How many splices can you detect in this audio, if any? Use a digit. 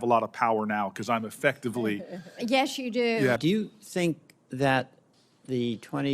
1